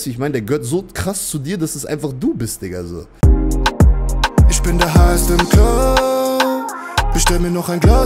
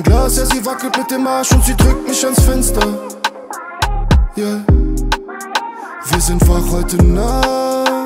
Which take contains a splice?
first; 1 cut; at 3.0 s

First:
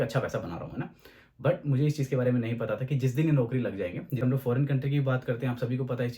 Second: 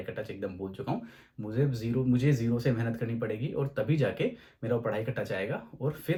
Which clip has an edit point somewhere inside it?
first; 1 cut; at 4.2 s

